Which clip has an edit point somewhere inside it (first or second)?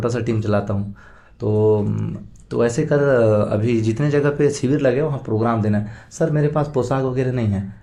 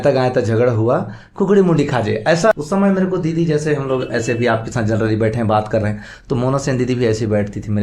second